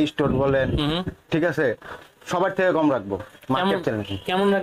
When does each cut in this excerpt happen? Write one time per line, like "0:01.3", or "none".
none